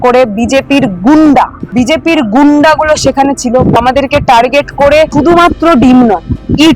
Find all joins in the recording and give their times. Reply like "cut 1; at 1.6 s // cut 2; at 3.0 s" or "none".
cut 1; at 1.6 s // cut 2; at 3.8 s // cut 3; at 5.1 s